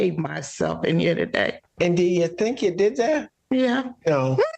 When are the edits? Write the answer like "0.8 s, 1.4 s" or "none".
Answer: 1.6 s